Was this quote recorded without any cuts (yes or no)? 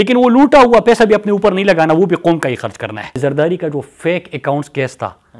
no